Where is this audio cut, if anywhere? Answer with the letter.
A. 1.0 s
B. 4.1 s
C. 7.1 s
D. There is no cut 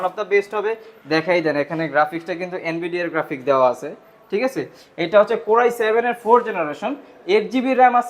D